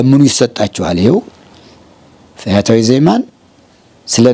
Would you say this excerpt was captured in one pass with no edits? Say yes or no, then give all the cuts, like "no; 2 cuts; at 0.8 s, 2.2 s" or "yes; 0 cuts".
yes; 0 cuts